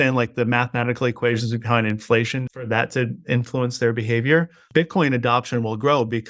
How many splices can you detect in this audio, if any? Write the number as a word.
two